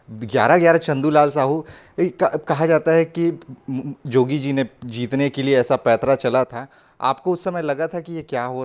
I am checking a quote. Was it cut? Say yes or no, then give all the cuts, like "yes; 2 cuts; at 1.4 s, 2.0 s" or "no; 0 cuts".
no; 0 cuts